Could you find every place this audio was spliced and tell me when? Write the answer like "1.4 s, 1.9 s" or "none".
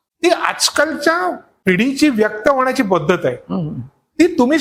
1.6 s